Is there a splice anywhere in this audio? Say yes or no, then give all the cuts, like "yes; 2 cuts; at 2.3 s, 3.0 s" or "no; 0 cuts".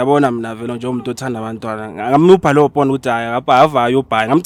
no; 0 cuts